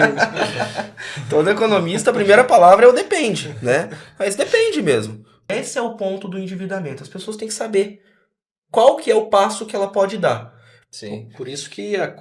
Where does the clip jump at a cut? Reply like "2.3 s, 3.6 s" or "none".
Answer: 5.5 s, 10.7 s